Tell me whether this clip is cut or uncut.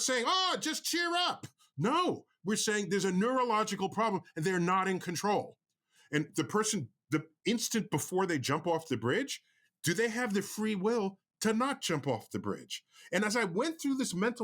uncut